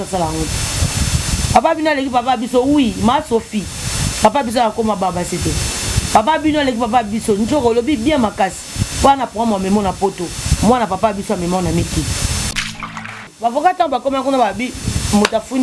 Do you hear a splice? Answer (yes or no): yes